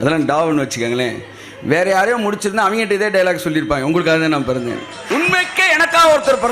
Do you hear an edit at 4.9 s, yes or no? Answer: yes